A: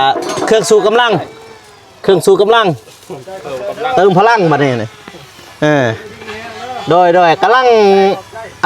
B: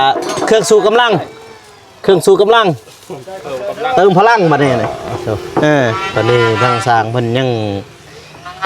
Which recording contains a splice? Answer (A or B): B